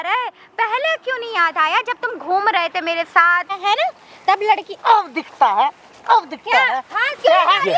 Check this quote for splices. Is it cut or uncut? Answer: cut